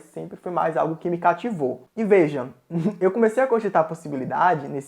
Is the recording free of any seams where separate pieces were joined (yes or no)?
no